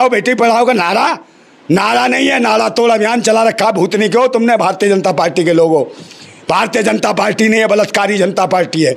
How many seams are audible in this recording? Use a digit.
0